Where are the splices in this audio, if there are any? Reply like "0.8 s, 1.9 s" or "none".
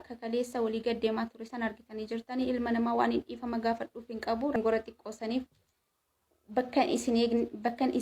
4.6 s